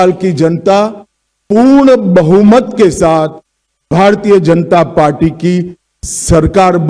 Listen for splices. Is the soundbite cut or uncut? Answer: uncut